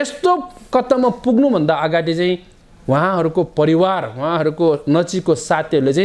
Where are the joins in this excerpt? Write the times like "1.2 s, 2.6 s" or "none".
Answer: none